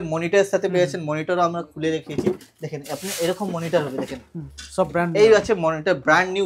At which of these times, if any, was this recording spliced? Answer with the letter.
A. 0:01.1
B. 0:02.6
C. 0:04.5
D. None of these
D